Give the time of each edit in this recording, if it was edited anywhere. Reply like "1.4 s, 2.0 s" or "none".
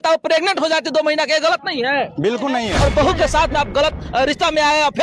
2.7 s